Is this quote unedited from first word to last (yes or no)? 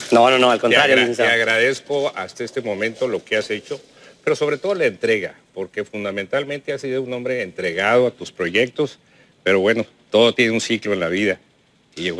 yes